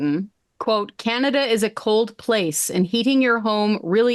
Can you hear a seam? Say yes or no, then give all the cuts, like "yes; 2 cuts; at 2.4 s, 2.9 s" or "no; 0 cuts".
no; 0 cuts